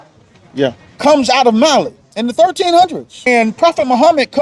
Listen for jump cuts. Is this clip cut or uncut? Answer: cut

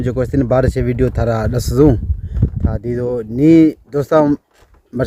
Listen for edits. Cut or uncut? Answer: uncut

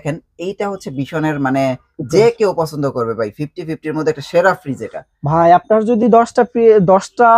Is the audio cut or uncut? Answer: uncut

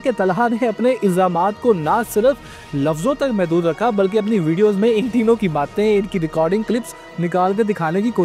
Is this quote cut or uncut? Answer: uncut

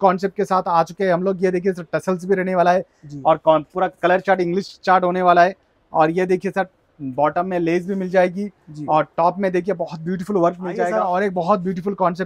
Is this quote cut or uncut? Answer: cut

